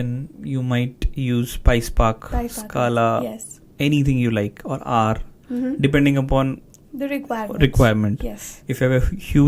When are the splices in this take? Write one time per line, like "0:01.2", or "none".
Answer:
none